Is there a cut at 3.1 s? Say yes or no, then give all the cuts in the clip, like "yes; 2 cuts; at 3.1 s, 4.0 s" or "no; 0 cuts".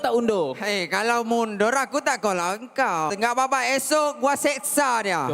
yes; 1 cut; at 3.1 s